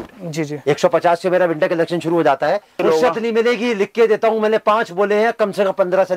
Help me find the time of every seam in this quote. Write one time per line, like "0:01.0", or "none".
0:02.8